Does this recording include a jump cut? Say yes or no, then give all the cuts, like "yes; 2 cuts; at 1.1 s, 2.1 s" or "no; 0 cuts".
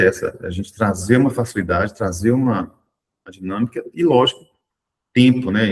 no; 0 cuts